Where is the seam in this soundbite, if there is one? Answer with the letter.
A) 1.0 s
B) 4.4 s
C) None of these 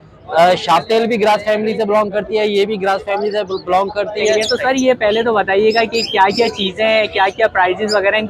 B